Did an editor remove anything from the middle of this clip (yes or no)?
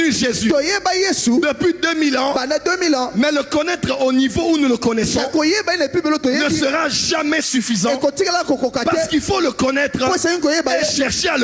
no